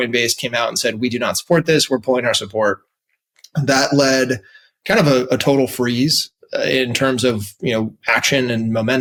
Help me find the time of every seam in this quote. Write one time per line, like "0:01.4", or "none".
none

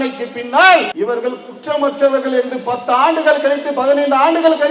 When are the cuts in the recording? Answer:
0:00.9

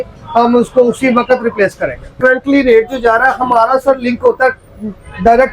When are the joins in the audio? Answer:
0:02.1

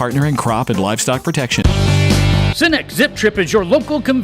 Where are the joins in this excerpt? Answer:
0:01.6

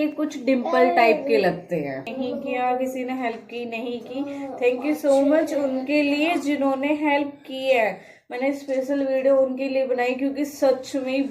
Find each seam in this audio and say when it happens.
0:02.1

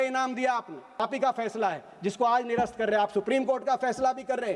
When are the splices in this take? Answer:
0:01.0

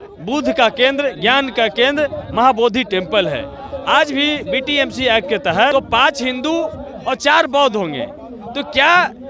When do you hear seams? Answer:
0:05.7

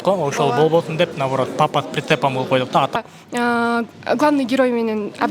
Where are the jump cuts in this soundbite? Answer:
0:02.9

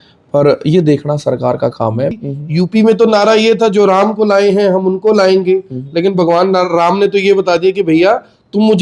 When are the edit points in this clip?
0:02.2

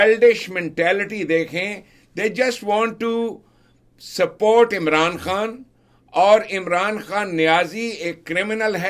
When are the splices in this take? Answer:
none

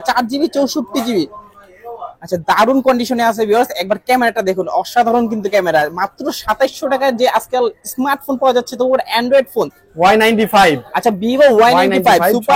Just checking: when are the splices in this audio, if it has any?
0:09.8

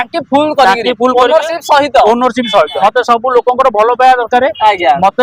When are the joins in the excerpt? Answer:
0:02.8

